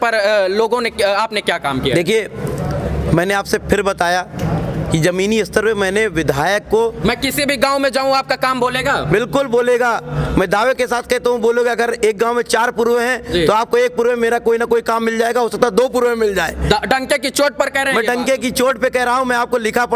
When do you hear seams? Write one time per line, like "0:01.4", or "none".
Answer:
none